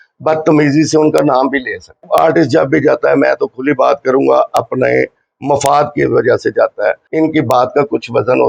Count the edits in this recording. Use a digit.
2